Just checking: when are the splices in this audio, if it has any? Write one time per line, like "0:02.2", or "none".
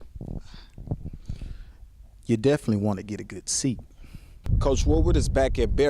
0:04.3

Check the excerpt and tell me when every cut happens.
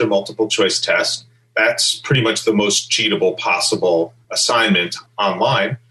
0:04.7

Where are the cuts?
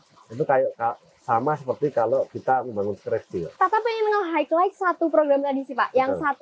0:03.5

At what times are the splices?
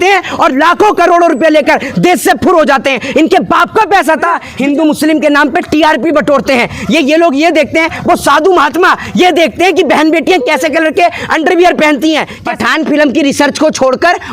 0:04.5
0:12.4

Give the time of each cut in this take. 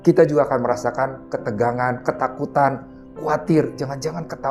none

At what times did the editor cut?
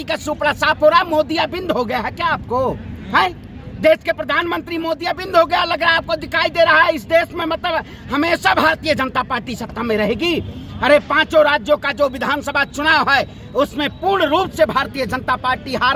none

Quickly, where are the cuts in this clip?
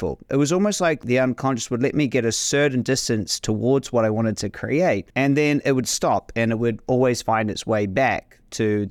0:01.0
0:05.1

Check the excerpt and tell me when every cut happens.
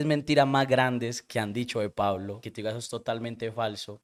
none

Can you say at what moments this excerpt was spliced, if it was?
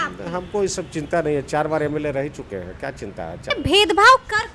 0:03.5

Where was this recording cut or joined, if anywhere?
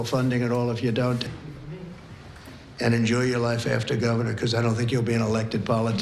0:01.2

